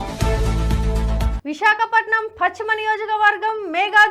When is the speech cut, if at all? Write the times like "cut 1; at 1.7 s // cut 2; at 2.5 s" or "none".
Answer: none